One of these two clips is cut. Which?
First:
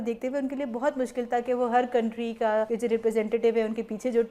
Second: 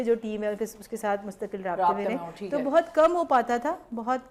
first; 1 cut; at 2.7 s

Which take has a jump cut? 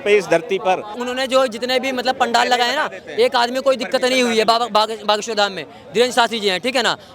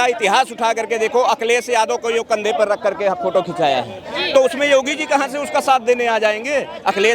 first; 1 cut; at 1.0 s

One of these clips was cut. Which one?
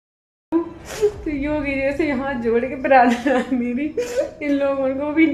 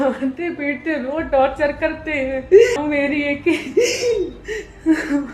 second; 1 cut; at 2.8 s

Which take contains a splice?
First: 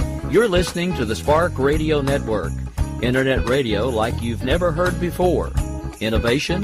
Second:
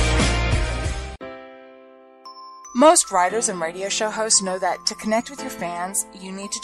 second; 1 cut; at 1.0 s

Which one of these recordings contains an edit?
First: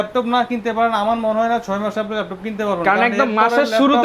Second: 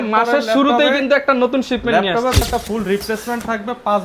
second; 1 cut; at 2.4 s

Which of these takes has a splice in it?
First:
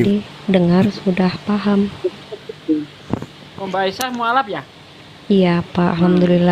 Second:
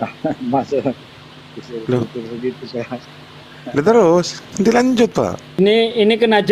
second; 1 cut; at 5.6 s

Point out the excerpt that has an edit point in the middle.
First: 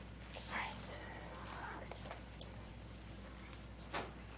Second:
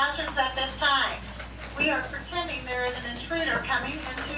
first; 1 cut; at 2.7 s

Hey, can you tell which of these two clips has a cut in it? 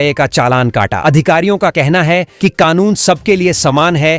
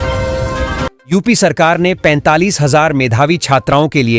second; 1 cut; at 1.1 s

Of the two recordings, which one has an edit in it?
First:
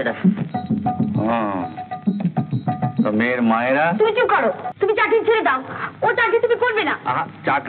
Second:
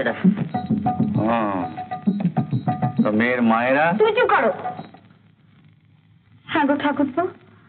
first; 1 cut; at 4.7 s

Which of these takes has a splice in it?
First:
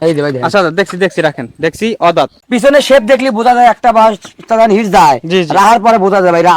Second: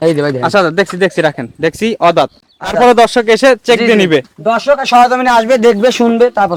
first; 1 cut; at 2.4 s

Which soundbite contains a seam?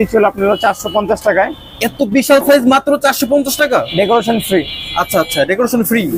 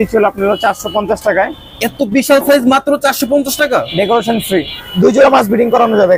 second; 1 cut; at 4.8 s

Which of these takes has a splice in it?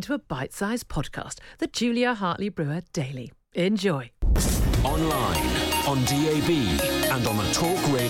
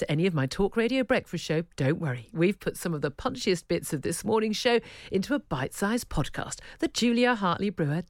first; 1 cut; at 4.3 s

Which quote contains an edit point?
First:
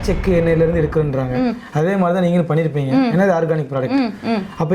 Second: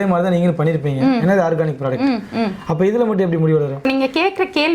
second; 1 cut; at 3.8 s

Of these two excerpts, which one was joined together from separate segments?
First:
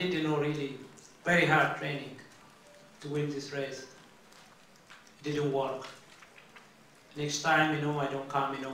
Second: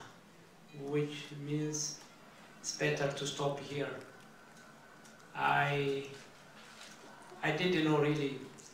second; 1 cut; at 6.3 s

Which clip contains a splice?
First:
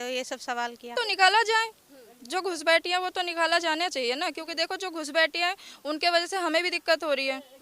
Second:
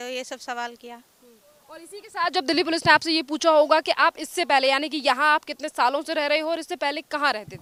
first; 1 cut; at 0.9 s

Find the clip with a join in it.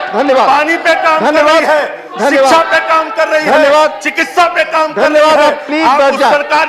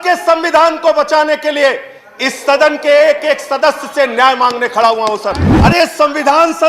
second; 1 cut; at 5.5 s

